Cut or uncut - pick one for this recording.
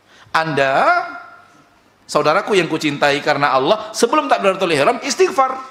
uncut